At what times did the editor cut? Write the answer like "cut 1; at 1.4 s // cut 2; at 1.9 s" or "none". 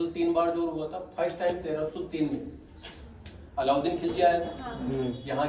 none